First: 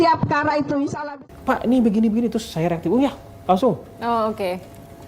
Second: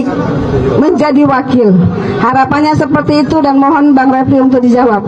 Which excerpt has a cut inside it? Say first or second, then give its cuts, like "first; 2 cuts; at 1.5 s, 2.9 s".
first; 1 cut; at 1.0 s